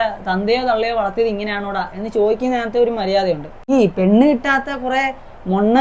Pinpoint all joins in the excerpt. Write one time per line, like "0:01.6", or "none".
0:03.7